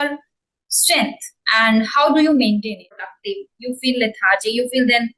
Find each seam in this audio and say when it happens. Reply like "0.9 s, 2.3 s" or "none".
3.2 s